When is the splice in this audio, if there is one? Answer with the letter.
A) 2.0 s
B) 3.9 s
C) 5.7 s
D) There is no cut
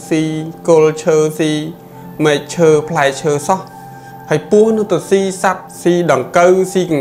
C